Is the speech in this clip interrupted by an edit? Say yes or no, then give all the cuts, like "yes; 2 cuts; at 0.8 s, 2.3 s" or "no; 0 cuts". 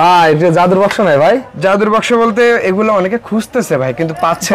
no; 0 cuts